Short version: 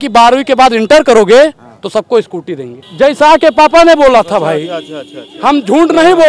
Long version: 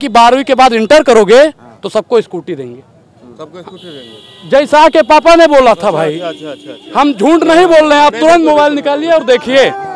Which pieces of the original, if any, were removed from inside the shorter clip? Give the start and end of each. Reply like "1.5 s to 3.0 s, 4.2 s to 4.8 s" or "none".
2.8 s to 4.3 s

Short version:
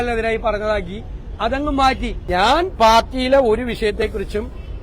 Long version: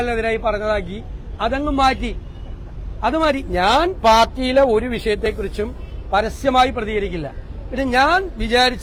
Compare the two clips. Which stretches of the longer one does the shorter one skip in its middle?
2.2 s to 3.5 s

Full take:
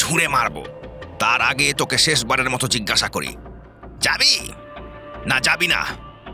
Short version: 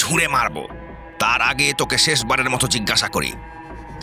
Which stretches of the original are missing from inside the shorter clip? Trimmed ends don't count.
none

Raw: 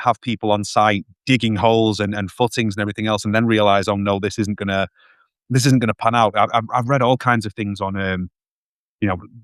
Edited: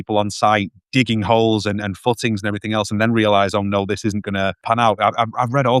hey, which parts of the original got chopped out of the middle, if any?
4.9 s to 6.0 s

